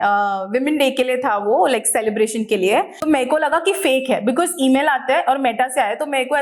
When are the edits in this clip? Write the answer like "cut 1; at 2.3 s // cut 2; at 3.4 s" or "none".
cut 1; at 3.0 s